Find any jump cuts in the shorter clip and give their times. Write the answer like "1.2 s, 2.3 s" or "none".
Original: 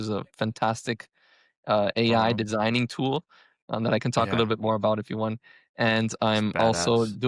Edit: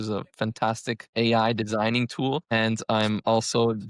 1.1 s, 2.5 s